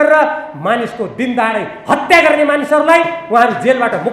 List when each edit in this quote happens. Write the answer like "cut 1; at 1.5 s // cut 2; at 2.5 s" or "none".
none